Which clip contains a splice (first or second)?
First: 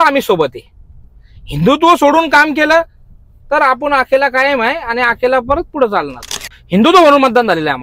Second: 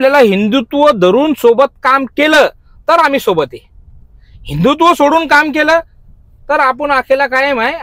first